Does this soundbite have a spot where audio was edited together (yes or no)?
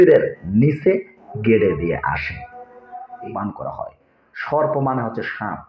yes